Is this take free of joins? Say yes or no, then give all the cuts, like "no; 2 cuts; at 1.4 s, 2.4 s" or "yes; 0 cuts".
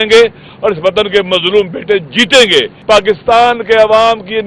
no; 1 cut; at 2.7 s